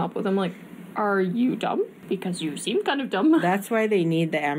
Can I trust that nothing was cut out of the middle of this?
no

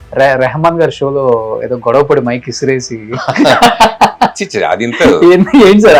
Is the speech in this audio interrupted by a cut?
no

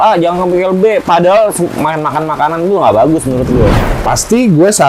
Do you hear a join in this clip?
yes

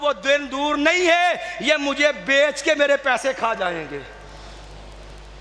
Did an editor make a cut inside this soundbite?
no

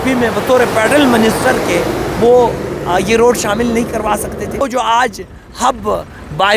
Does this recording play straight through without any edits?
no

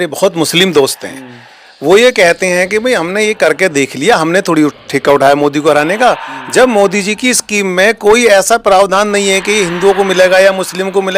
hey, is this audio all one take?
yes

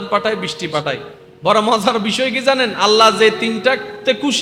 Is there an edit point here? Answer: no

